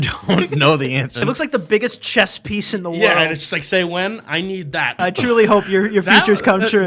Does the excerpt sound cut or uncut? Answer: cut